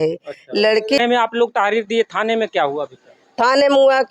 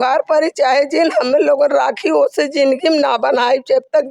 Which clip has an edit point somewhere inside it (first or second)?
first